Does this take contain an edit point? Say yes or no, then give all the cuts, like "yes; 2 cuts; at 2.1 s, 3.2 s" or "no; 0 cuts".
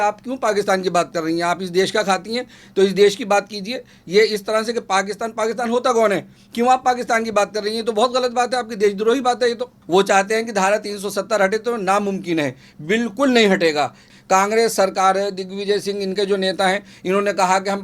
yes; 2 cuts; at 9.7 s, 14.1 s